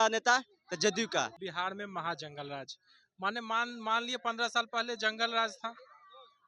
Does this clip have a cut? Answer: yes; 1 cut; at 1.4 s

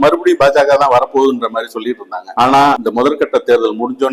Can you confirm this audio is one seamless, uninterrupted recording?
yes; 0 cuts

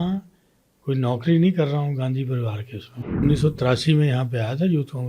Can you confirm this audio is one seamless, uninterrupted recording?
no; 1 cut; at 3.2 s

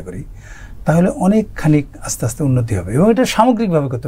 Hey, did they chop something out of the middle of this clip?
no; 0 cuts

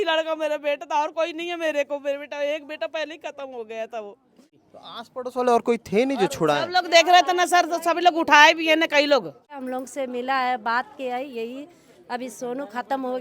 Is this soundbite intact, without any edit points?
no; 2 cuts; at 4.6 s, 9.6 s

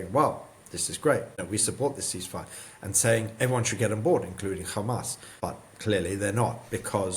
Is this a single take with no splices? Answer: no; 2 cuts; at 1.4 s, 5.2 s

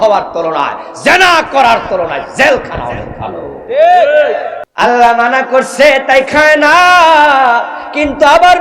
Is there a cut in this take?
yes; 1 cut; at 4.6 s

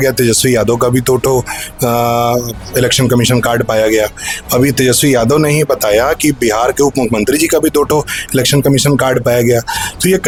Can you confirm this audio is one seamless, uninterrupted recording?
yes; 0 cuts

